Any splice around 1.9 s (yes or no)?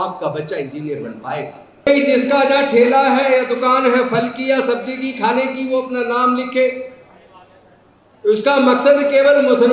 yes